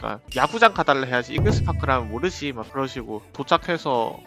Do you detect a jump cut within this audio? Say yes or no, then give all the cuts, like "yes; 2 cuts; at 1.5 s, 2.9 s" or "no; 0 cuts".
no; 0 cuts